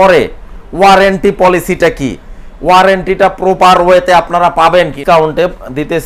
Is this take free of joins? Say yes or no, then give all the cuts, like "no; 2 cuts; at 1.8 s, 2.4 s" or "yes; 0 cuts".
no; 1 cut; at 5.0 s